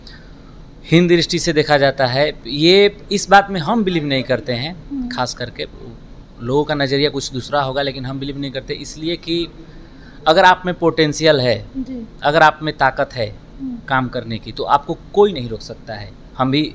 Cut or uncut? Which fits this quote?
uncut